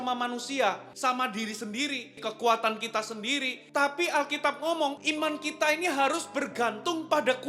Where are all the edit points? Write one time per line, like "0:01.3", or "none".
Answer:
0:00.9
0:02.1
0:03.6
0:05.0

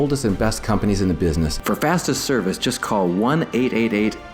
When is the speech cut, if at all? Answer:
0:01.6

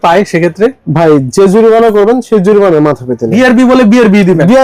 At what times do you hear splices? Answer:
0:03.3

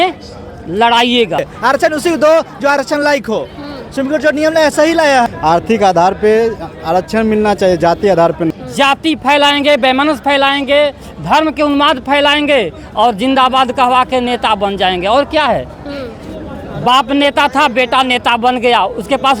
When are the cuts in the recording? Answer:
0:01.5
0:05.2
0:08.6

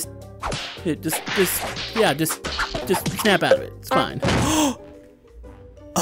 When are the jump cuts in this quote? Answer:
0:04.4

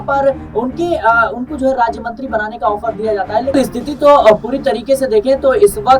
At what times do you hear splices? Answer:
0:03.6

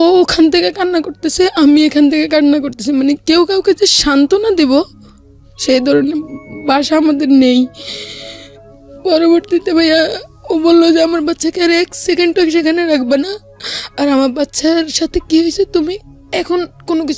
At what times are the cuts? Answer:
none

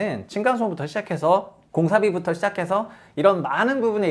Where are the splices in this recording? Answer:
0:01.6

